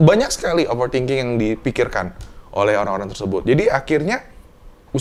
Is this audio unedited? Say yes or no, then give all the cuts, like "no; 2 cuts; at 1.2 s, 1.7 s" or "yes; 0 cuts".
yes; 0 cuts